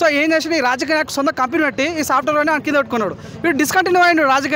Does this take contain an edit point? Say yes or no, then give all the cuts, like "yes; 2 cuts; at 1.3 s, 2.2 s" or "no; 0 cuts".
no; 0 cuts